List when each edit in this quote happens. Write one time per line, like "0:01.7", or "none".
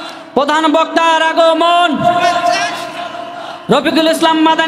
none